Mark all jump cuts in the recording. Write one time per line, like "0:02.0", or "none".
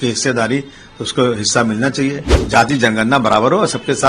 0:02.3